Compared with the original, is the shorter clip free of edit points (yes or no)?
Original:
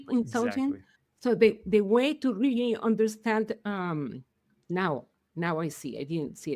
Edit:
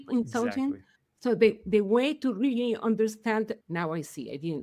no